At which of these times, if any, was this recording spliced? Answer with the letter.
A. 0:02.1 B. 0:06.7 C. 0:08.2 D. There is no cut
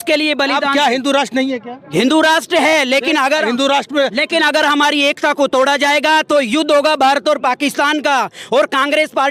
D